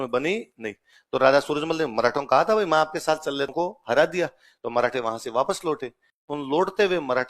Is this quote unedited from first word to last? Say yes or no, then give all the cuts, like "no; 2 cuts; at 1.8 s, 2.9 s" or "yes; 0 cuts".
no; 1 cut; at 3.5 s